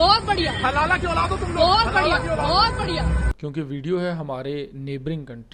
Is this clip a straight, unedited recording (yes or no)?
yes